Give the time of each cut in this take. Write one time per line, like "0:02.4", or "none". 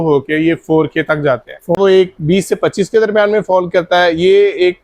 0:01.8